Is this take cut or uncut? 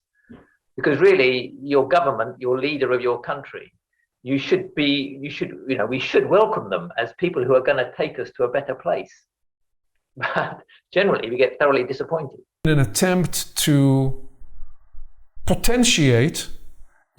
cut